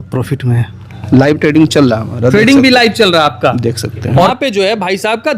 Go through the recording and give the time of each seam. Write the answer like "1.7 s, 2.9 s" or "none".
1.0 s, 4.3 s

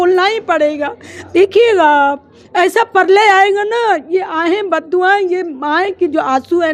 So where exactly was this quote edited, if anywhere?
none

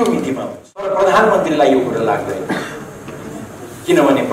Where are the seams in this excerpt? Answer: 0.9 s

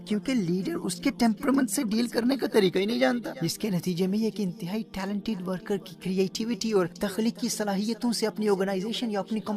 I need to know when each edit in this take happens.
3.4 s, 7.0 s

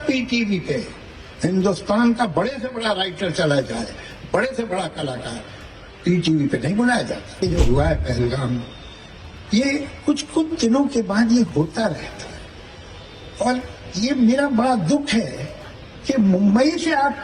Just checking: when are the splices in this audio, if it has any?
7.4 s

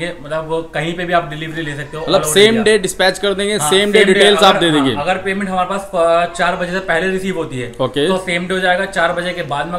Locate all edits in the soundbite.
none

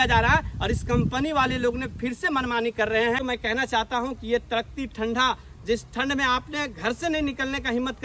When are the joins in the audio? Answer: 3.2 s

